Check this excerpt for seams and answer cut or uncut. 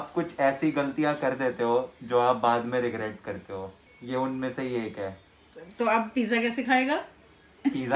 uncut